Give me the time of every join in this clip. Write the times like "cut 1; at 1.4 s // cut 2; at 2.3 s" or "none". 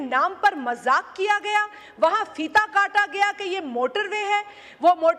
none